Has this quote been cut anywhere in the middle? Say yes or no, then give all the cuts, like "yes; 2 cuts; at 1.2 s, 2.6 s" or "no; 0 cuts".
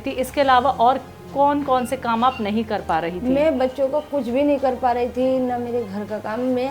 no; 0 cuts